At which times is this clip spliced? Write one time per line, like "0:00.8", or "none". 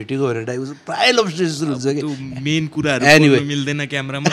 none